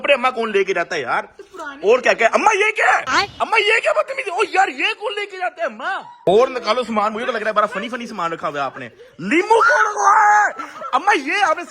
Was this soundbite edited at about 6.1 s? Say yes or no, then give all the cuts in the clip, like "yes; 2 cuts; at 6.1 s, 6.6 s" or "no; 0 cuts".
yes; 1 cut; at 6.1 s